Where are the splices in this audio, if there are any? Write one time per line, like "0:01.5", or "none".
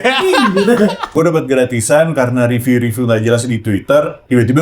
0:01.1